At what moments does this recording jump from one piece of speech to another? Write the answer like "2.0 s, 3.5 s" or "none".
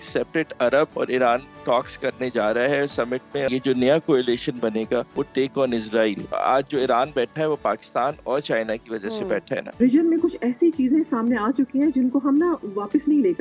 0.9 s, 3.5 s, 5.1 s, 6.3 s, 9.8 s